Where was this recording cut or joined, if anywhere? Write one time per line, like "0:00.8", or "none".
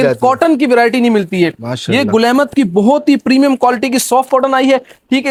none